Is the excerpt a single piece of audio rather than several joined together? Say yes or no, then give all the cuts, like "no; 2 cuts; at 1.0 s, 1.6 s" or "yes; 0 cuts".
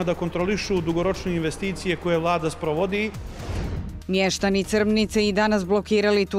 no; 1 cut; at 3.2 s